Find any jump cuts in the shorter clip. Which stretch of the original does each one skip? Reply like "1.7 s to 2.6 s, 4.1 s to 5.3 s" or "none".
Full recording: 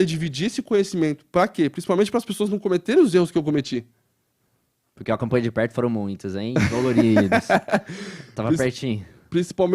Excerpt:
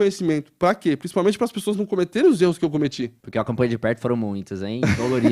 3.9 s to 4.9 s